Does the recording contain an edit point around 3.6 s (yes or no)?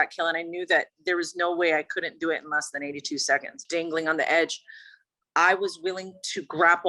yes